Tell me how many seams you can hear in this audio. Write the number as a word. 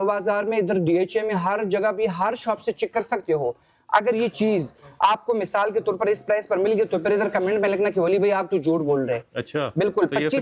zero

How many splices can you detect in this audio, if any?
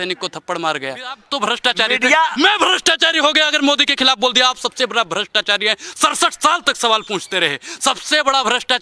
one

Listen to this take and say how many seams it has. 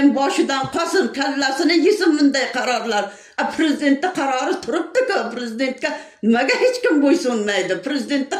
zero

